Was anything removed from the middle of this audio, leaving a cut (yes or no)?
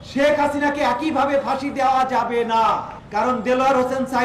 yes